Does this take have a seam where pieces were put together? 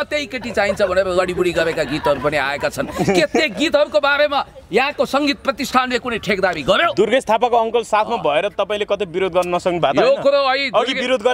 no; 0 cuts

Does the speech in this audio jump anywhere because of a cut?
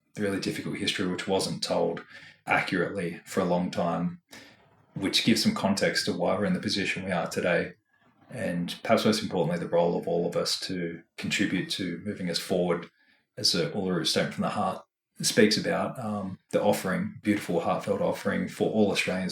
yes; 1 cut; at 2.4 s

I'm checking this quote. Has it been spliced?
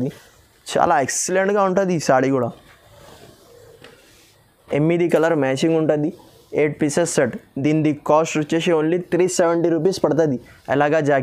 no; 0 cuts

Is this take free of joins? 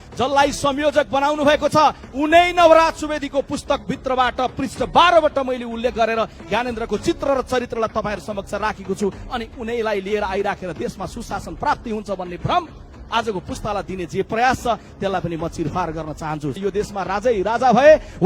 no; 1 cut; at 16.6 s

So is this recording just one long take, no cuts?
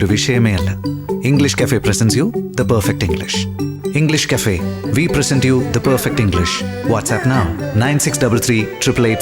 yes; 0 cuts

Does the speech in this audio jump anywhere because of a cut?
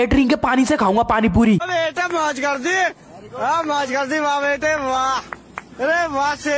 yes; 1 cut; at 5.4 s

